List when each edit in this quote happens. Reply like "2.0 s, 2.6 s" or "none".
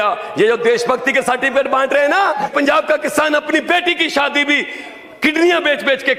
2.5 s